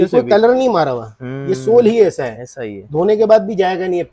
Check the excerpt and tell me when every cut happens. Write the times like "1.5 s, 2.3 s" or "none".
none